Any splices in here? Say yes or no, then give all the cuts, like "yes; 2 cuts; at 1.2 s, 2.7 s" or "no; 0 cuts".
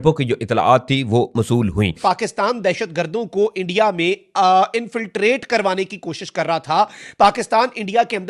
yes; 1 cut; at 1.9 s